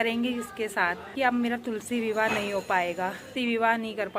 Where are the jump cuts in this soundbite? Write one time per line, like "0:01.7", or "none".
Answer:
0:01.1
0:03.3